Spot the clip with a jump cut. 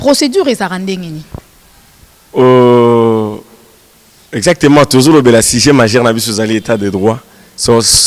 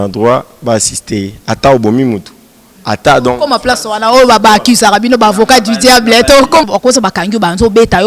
second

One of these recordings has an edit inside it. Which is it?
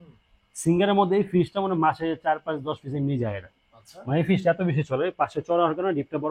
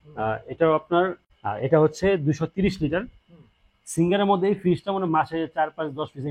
second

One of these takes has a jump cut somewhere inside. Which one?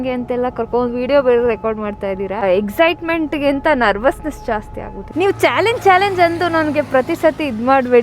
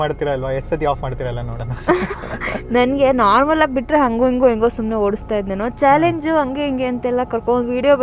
first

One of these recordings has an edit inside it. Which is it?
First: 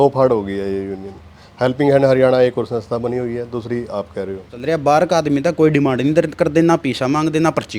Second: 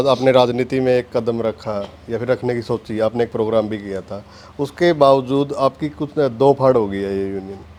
first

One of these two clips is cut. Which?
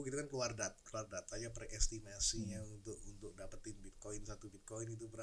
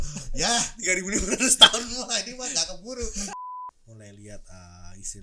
second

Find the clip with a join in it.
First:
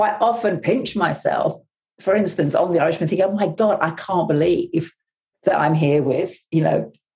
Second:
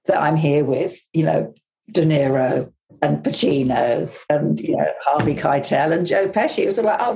second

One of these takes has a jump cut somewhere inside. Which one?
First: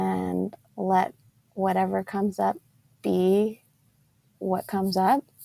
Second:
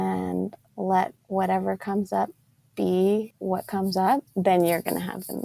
second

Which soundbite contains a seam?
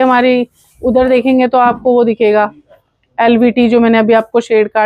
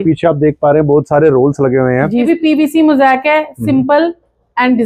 second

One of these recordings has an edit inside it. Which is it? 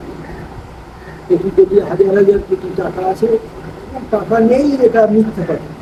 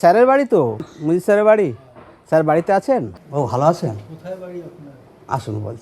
second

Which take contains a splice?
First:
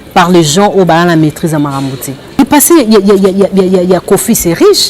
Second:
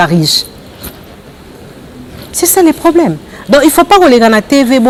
first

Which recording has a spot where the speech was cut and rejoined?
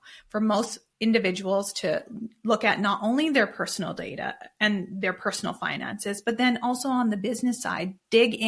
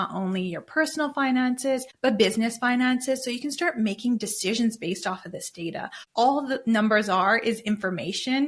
second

